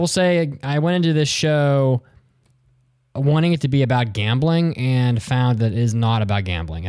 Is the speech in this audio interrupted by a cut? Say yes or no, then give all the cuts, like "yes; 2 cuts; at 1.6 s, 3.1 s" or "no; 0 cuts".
no; 0 cuts